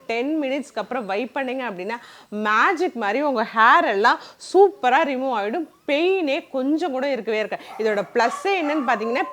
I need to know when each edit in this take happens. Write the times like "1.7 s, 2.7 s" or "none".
none